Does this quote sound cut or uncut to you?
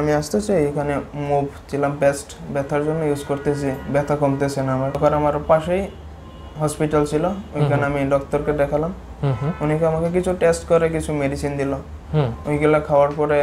cut